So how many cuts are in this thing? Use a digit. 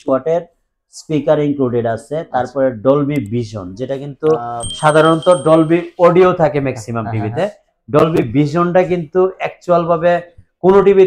0